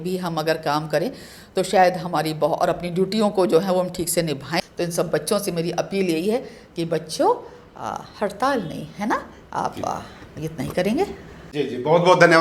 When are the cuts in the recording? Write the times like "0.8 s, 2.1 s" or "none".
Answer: none